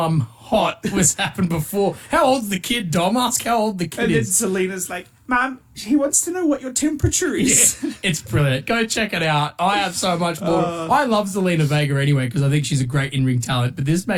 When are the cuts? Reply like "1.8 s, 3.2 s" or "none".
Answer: none